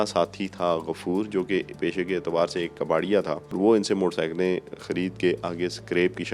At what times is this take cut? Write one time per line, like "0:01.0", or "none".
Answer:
0:03.6